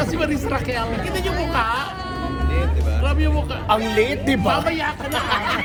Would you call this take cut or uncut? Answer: uncut